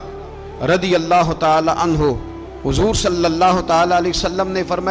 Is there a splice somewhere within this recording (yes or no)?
no